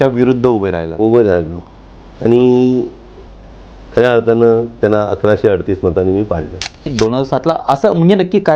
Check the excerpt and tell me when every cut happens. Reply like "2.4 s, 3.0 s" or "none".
6.9 s